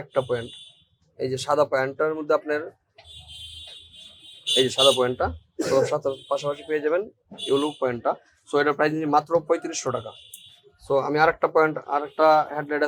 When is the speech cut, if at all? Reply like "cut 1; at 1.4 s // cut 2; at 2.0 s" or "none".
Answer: none

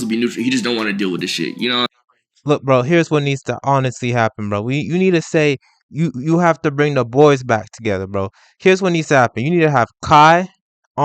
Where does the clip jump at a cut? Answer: cut 1; at 2.3 s

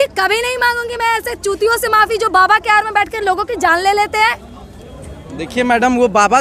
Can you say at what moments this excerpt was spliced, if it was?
none

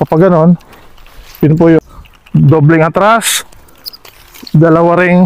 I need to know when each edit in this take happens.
cut 1; at 1.8 s

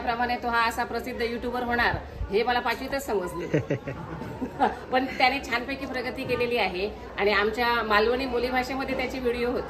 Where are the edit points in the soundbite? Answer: none

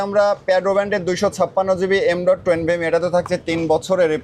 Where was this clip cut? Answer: none

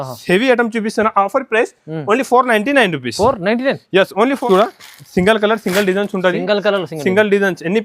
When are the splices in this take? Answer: cut 1; at 4.4 s

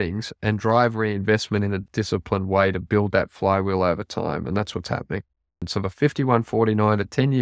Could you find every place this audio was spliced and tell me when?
cut 1; at 1.8 s // cut 2; at 5.7 s

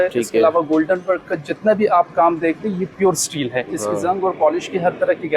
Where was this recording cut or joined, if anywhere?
cut 1; at 3.7 s

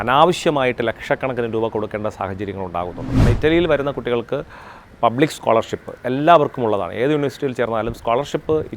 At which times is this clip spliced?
cut 1; at 3.2 s

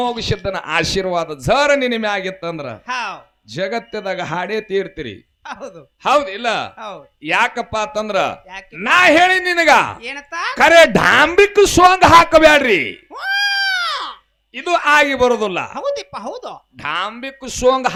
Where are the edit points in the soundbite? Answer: none

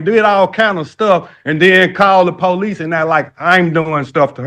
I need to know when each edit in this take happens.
none

